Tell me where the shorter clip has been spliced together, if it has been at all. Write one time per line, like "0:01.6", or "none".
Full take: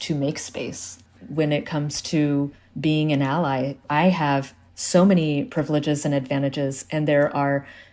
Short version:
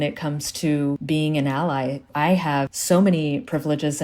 0:01.0
0:02.8

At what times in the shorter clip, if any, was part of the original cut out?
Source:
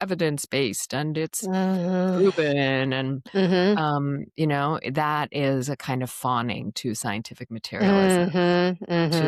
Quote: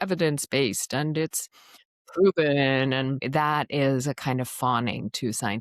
0:03.2

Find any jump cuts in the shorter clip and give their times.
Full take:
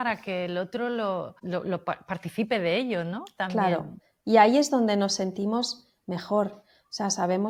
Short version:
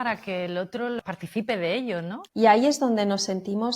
0:01.0
0:02.2

